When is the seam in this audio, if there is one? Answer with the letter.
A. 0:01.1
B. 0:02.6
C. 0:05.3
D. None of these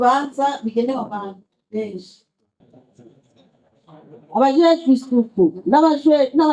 B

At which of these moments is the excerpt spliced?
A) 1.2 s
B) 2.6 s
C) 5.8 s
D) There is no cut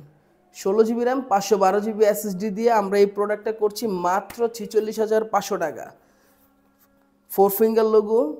D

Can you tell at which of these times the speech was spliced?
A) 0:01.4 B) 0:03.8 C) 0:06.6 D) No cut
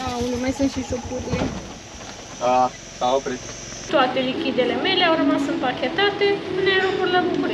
B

